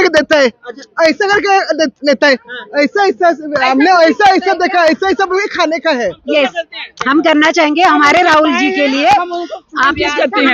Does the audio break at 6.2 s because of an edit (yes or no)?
yes